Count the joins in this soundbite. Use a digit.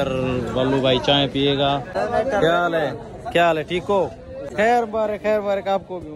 2